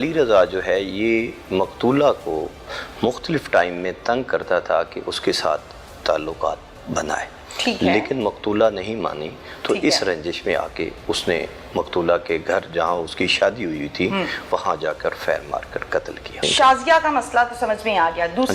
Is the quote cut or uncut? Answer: cut